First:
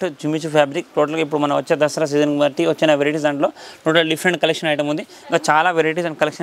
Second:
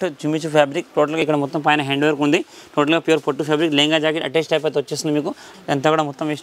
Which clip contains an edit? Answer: second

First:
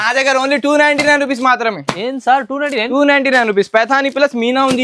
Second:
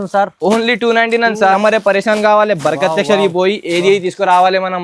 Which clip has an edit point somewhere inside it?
second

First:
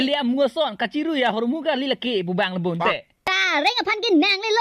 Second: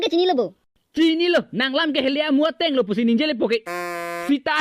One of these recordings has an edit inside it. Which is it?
first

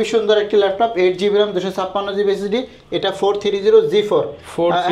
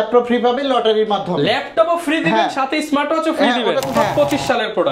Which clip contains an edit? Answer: second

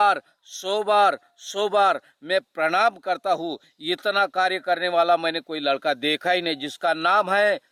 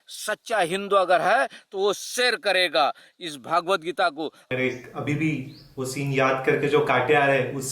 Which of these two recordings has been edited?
second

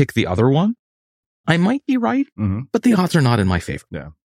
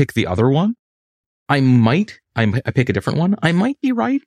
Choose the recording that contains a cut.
first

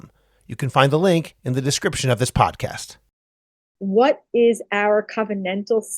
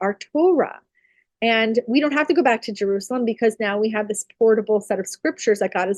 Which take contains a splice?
first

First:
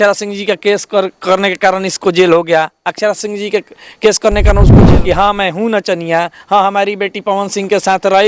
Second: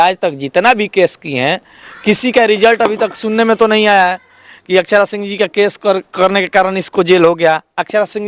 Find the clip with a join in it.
first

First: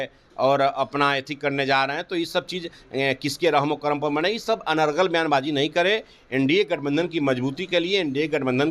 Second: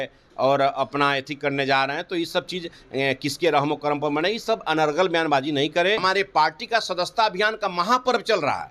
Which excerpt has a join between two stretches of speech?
second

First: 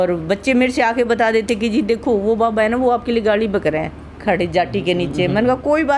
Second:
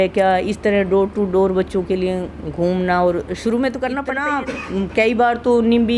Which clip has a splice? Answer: second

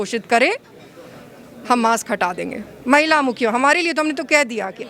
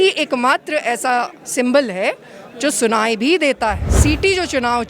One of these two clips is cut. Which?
second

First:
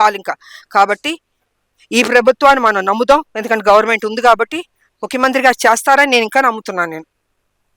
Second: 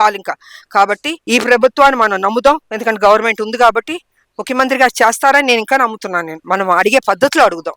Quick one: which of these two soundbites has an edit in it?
second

